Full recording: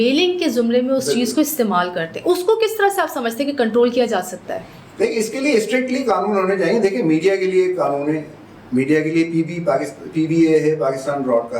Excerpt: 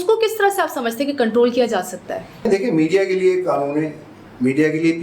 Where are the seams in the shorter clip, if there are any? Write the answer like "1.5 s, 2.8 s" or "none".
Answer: 2.5 s